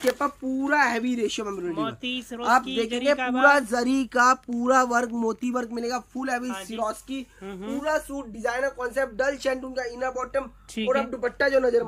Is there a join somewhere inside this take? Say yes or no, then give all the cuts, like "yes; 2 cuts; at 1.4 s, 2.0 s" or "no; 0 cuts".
no; 0 cuts